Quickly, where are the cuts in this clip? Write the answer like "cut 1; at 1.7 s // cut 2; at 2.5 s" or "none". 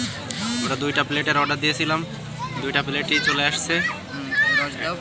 none

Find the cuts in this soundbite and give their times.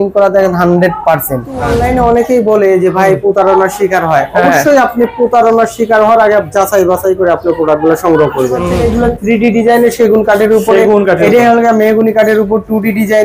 cut 1; at 1.7 s // cut 2; at 8.7 s

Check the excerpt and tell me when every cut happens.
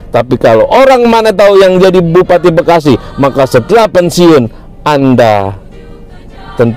none

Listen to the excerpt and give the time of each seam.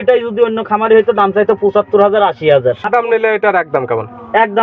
cut 1; at 2.8 s

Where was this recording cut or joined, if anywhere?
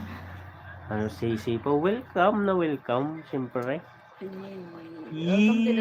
none

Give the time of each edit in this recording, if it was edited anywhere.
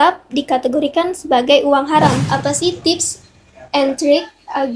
cut 1; at 2.2 s

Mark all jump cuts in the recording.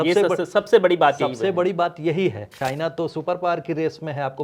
cut 1; at 2.6 s

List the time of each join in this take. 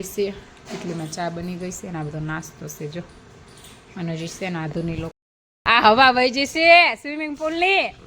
cut 1; at 5.5 s

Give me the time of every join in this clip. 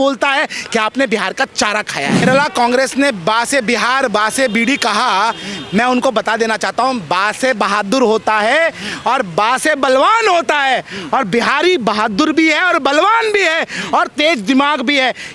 cut 1; at 2.2 s

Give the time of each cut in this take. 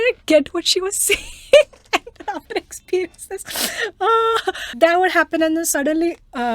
cut 1; at 4.6 s

